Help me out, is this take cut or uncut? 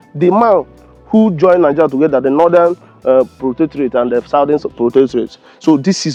uncut